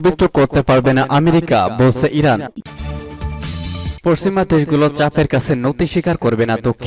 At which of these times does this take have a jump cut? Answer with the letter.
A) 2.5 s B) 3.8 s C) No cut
A